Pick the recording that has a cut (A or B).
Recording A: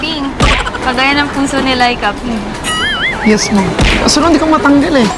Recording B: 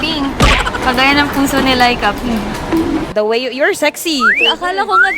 B